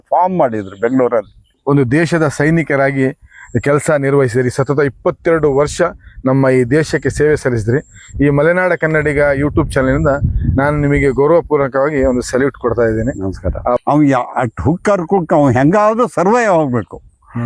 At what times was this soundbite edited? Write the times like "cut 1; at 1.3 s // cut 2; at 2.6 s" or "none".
cut 1; at 1.5 s // cut 2; at 13.8 s